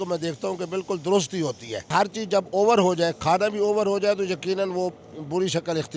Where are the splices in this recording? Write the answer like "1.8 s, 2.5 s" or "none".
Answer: 1.9 s